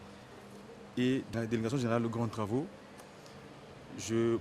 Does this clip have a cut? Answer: yes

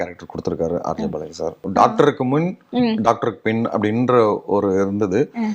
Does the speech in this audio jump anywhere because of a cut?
yes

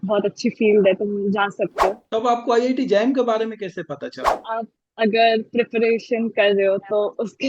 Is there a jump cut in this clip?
yes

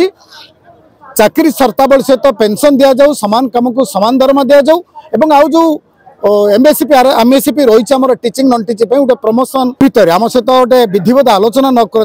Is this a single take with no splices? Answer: no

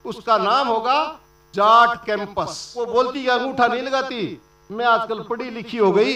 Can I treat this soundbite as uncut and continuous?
no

